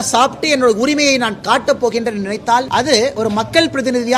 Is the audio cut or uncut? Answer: cut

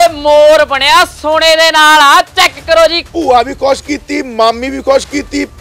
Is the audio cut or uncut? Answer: cut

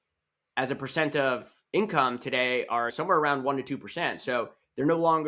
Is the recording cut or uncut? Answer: cut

